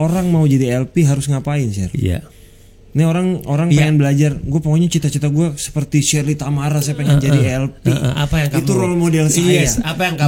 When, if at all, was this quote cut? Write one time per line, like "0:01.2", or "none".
none